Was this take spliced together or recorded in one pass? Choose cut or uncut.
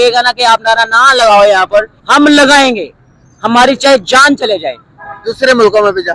cut